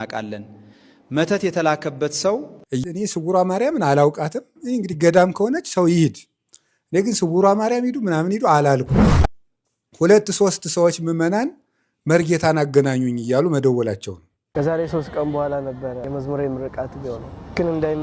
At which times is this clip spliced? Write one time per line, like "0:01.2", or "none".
0:02.8
0:09.2
0:14.3